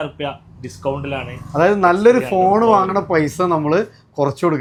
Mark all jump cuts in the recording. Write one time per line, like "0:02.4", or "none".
none

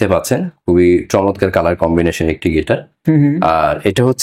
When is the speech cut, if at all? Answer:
none

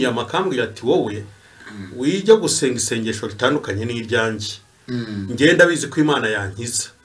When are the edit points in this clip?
none

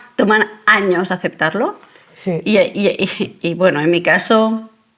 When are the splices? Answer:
none

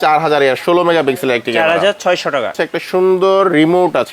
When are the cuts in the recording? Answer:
0:02.5

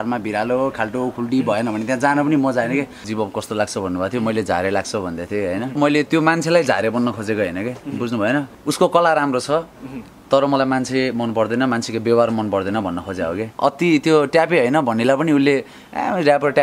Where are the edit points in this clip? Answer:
0:03.1
0:05.8
0:08.5
0:13.5

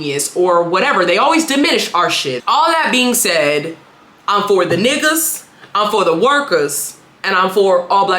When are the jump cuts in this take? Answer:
0:02.3

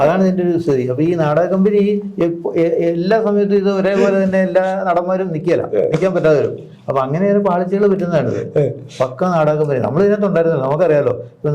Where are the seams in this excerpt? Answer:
none

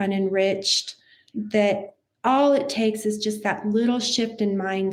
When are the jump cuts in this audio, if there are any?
none

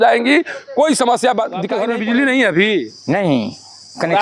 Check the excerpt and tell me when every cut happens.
0:01.8

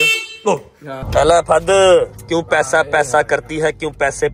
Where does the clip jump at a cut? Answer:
0:01.1

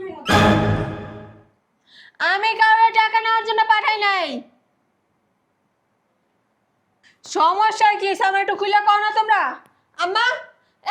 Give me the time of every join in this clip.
none

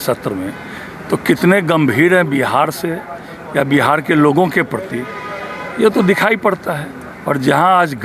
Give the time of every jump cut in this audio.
none

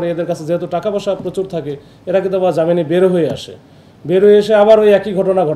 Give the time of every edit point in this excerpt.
none

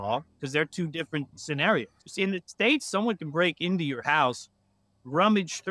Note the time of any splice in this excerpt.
0:02.0

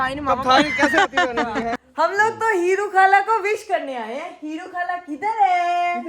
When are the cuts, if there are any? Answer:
0:01.8

